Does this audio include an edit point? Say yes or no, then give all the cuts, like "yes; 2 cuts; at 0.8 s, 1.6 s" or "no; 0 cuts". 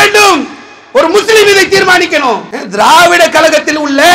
yes; 1 cut; at 2.6 s